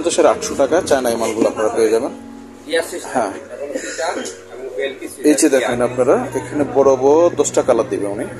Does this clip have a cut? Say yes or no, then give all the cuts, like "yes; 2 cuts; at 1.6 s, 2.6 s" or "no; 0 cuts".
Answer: no; 0 cuts